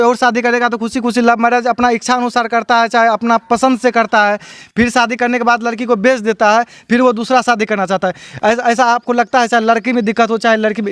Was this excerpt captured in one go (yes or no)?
yes